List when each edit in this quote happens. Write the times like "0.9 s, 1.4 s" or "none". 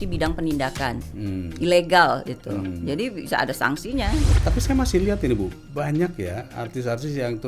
4.3 s